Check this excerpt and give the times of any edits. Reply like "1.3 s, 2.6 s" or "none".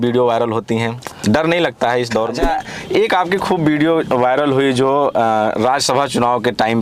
2.4 s